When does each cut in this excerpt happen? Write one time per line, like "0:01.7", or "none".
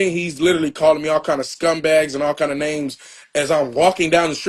none